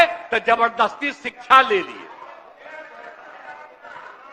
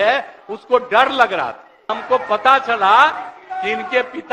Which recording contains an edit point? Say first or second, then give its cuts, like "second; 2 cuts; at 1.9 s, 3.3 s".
second; 1 cut; at 2.0 s